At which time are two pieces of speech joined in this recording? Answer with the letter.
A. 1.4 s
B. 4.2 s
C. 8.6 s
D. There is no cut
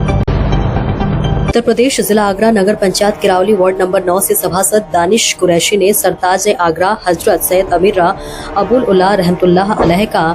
A